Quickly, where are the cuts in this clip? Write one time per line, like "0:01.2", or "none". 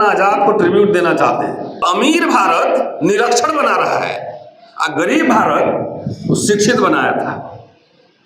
0:01.8

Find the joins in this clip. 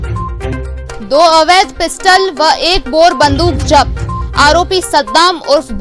0:01.0

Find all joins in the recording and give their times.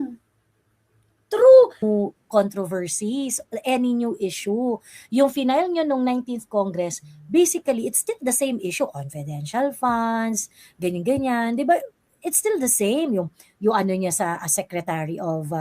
0:01.8

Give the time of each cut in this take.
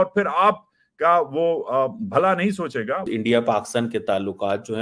0:03.0

